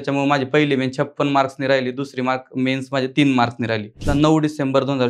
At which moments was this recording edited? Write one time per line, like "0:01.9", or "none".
0:04.0